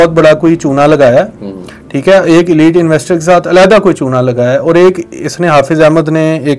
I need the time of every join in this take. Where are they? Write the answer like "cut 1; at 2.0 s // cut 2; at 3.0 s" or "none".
none